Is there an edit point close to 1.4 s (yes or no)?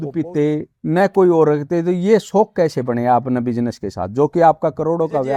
no